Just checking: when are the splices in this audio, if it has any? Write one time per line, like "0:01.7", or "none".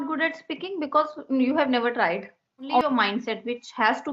0:02.8